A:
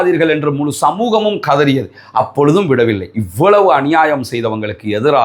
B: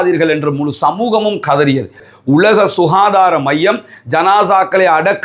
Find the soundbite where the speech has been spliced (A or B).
B